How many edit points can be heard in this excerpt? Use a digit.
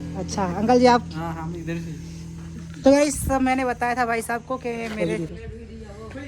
1